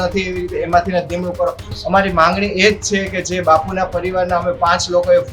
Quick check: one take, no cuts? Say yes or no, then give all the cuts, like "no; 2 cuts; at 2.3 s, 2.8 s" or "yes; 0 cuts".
no; 1 cut; at 1.7 s